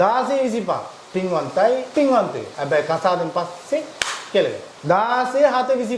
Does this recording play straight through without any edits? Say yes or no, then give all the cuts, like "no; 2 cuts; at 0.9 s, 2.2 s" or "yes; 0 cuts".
no; 3 cuts; at 1.9 s, 2.5 s, 4.7 s